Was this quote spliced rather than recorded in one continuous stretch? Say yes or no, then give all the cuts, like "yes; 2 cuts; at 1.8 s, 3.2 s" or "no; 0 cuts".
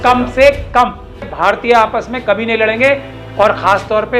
yes; 1 cut; at 1.3 s